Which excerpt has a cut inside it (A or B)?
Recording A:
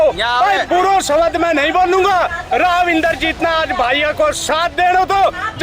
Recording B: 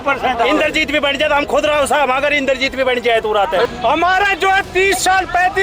B